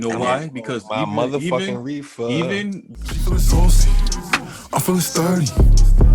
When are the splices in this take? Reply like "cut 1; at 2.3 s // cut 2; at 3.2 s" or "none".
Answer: cut 1; at 2.9 s